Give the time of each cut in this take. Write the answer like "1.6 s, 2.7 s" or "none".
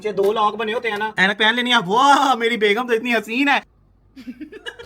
1.1 s, 3.6 s